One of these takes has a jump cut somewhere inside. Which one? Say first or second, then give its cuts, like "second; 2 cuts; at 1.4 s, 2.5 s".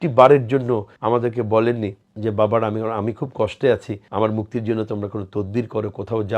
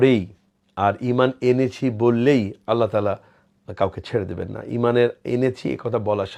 first; 3 cuts; at 0.9 s, 2.0 s, 4.0 s